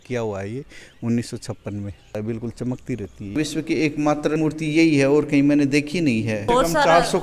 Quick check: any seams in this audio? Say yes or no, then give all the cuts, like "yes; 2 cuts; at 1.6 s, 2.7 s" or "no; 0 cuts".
yes; 4 cuts; at 2.1 s, 3.4 s, 4.4 s, 6.4 s